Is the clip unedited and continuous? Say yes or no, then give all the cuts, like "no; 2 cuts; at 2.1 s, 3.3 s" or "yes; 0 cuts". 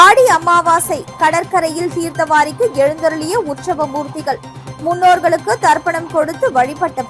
yes; 0 cuts